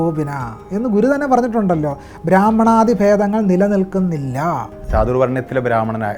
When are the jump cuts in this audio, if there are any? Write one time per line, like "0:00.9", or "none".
0:04.8